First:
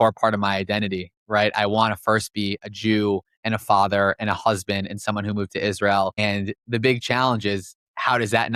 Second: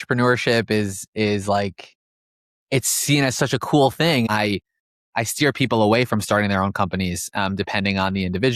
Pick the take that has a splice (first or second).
second